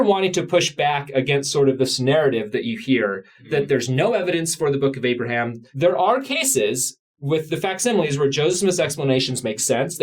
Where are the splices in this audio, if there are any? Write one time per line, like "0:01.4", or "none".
0:05.6